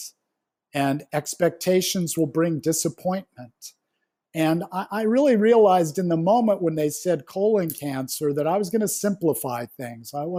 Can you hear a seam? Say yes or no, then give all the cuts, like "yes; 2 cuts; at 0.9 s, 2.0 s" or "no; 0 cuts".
no; 0 cuts